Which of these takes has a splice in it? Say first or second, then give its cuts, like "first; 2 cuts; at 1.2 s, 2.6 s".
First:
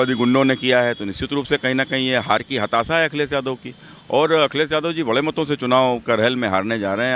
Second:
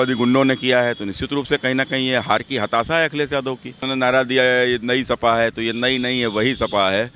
second; 1 cut; at 3.8 s